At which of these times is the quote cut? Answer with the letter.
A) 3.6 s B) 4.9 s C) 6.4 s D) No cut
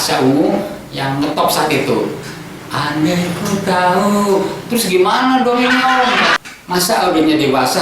C